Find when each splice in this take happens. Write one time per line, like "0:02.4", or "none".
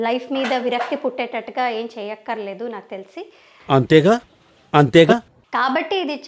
0:05.3